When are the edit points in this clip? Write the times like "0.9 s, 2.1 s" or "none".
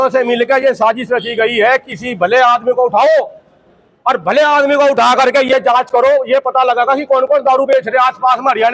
none